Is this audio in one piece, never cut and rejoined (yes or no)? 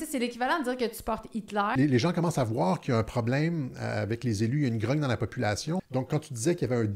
no